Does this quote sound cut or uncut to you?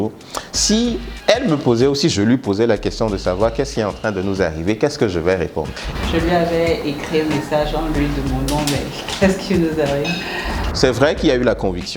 cut